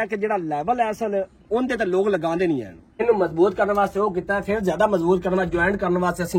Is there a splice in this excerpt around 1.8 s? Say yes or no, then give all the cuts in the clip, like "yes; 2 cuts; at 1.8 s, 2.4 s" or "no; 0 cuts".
no; 1 cut; at 3.0 s